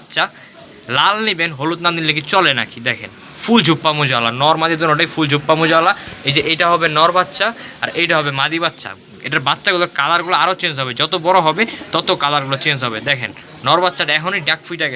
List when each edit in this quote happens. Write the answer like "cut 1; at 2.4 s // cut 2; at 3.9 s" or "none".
none